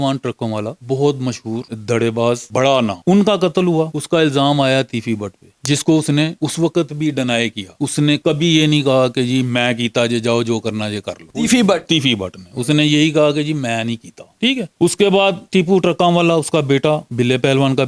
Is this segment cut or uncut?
uncut